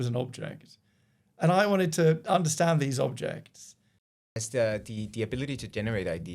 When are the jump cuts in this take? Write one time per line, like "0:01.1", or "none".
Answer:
0:04.3